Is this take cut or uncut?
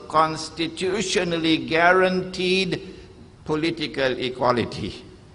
cut